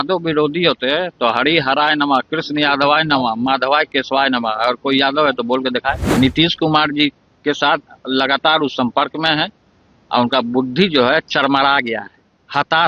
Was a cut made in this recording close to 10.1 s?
no; 1 cut; at 6.0 s

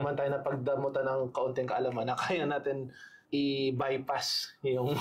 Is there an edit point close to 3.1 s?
yes; 1 cut; at 3.1 s

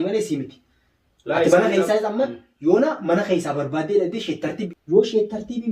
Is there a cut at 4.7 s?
yes; 1 cut; at 4.7 s

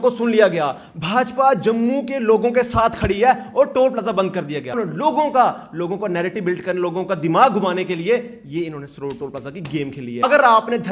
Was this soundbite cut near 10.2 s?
yes; 2 cuts; at 4.7 s, 10.2 s

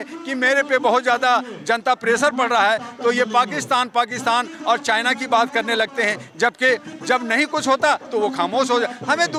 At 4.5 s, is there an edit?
no; 0 cuts

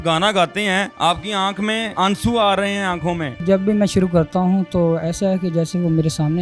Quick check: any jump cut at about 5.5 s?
no; 3 cuts; at 0.9 s, 1.9 s, 3.4 s

